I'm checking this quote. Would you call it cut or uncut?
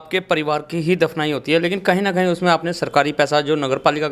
uncut